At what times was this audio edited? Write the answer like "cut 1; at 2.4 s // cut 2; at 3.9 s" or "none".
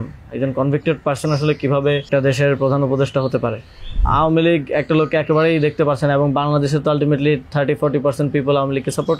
cut 1; at 2.1 s // cut 2; at 4.0 s